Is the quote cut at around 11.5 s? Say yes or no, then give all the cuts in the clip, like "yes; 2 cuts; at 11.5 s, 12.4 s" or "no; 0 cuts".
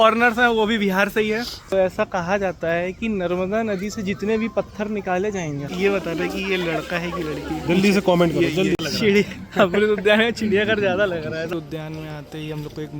yes; 4 cuts; at 1.7 s, 5.7 s, 8.8 s, 11.5 s